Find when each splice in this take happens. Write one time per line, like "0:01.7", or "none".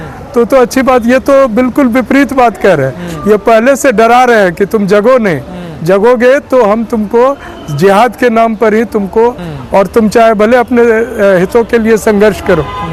none